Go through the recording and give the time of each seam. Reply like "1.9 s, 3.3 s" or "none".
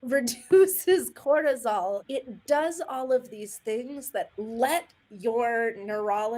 2.0 s, 4.3 s